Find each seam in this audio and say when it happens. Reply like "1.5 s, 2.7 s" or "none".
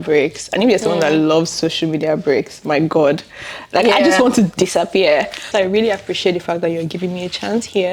5.5 s